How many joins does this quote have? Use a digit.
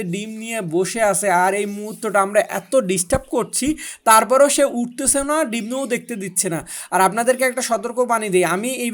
0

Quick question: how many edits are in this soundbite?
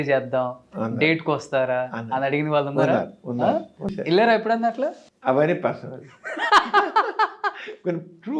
2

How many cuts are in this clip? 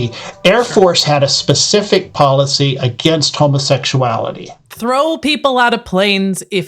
1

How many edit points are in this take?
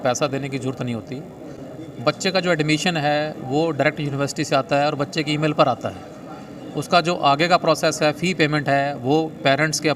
0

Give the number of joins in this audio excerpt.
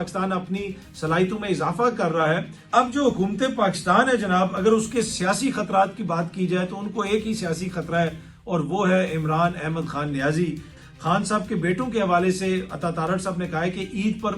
2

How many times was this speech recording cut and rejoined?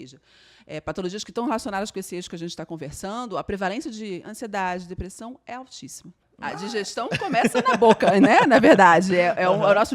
1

